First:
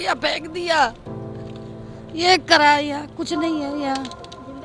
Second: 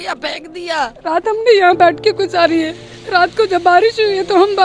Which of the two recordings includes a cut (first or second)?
second